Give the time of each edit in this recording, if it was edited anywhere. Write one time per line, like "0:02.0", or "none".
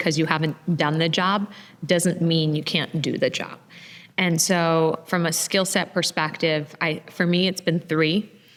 none